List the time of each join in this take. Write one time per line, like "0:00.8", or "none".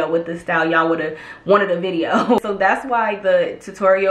0:02.4